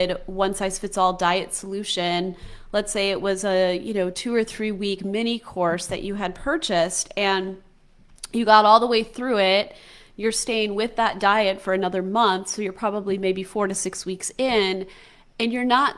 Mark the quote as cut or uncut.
uncut